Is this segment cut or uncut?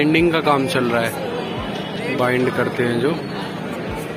uncut